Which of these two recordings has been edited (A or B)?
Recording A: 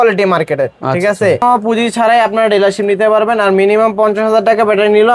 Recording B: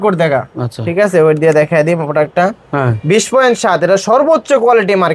A